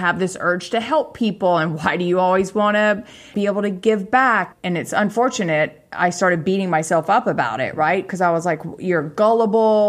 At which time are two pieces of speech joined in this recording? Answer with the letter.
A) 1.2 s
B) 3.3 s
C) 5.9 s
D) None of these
B